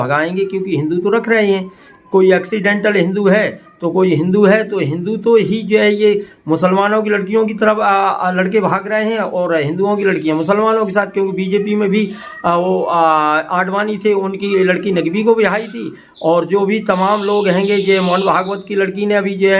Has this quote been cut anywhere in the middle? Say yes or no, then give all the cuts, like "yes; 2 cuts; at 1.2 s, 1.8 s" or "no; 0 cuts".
no; 0 cuts